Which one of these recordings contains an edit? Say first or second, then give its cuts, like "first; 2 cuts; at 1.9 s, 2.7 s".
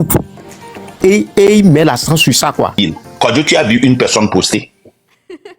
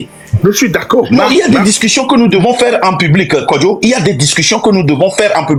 first; 1 cut; at 2.8 s